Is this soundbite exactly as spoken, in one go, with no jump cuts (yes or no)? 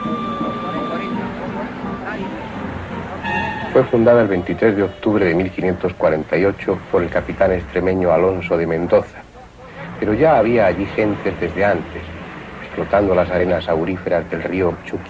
yes